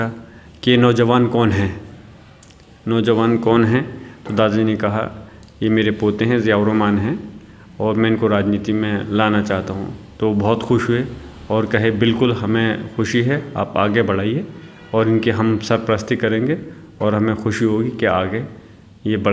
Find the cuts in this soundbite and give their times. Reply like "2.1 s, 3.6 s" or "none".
none